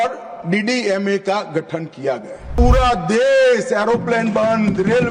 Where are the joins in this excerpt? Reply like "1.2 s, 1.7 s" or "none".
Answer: 2.5 s